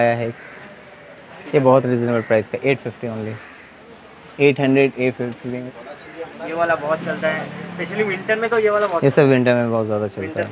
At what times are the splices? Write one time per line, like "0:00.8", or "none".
0:05.6